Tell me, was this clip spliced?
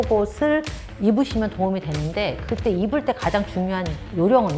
no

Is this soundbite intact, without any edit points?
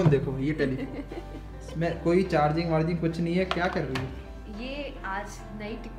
yes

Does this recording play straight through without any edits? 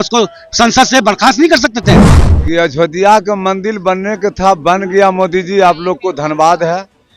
no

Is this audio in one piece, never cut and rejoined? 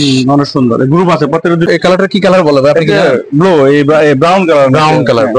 no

